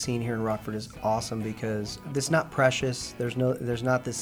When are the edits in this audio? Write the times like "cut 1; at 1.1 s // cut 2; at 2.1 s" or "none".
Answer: cut 1; at 2.0 s